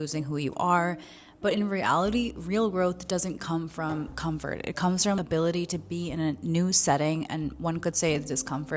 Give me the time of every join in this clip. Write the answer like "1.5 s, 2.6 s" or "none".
5.2 s